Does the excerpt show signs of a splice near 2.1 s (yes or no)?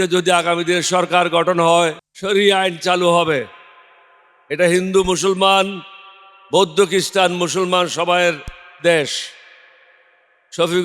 yes